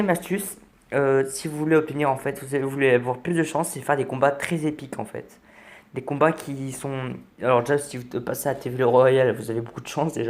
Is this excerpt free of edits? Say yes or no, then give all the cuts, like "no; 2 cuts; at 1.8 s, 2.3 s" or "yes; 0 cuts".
no; 1 cut; at 5.3 s